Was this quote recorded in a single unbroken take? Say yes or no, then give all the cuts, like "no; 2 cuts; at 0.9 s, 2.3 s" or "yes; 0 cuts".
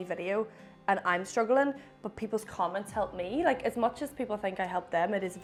yes; 0 cuts